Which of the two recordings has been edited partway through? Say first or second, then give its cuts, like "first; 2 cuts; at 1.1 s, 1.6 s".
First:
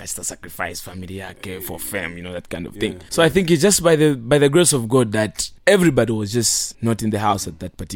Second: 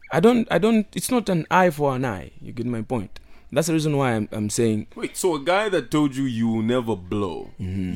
first; 3 cuts; at 3.0 s, 5.4 s, 6.6 s